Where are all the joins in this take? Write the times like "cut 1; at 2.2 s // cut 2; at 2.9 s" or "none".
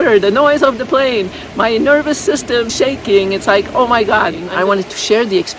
cut 1; at 2.7 s // cut 2; at 4.4 s